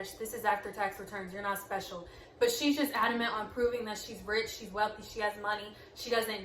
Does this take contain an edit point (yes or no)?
no